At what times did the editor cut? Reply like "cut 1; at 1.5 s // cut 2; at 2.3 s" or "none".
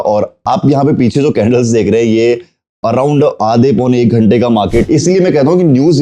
cut 1; at 4.8 s